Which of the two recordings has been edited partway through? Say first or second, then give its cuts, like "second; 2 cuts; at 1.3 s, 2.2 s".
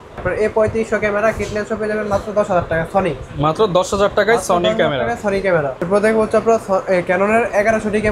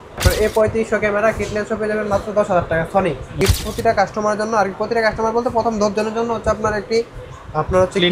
second; 1 cut; at 3.3 s